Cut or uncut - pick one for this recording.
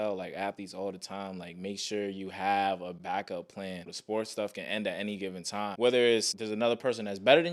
cut